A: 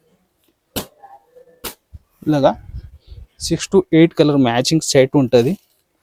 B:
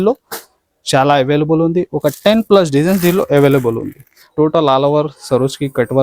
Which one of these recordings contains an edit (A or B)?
B